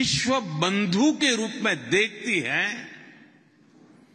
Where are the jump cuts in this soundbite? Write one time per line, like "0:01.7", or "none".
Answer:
none